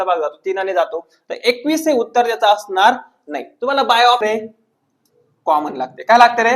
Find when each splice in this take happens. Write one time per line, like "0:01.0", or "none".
0:04.2